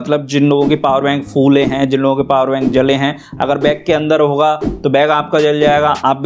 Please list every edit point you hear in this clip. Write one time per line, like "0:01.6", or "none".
none